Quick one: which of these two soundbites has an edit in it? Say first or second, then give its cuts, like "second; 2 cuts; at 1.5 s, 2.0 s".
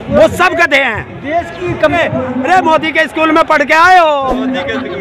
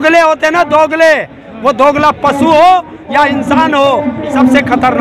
first; 1 cut; at 1.9 s